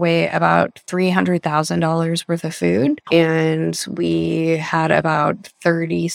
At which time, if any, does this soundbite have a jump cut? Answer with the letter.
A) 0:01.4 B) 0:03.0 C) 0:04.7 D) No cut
B